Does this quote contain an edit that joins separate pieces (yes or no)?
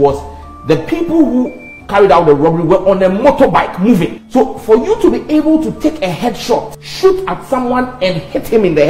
yes